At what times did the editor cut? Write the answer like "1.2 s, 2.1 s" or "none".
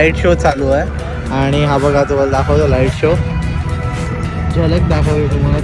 none